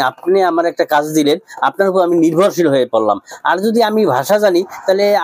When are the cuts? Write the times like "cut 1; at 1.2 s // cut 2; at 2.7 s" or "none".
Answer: none